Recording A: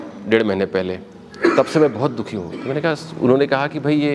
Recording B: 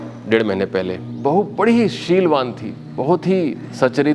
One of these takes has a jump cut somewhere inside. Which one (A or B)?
B